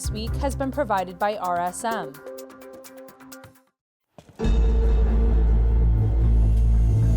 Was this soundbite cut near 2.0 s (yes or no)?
yes